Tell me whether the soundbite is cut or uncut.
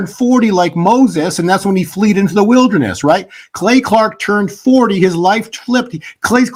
uncut